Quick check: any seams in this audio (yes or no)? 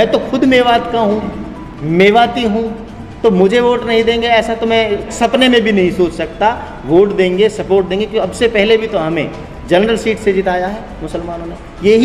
no